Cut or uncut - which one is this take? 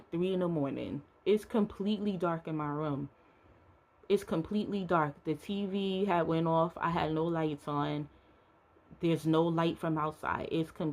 uncut